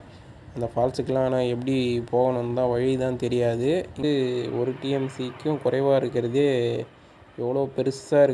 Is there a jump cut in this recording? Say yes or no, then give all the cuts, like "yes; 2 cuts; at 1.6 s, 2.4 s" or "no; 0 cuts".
yes; 1 cut; at 4.0 s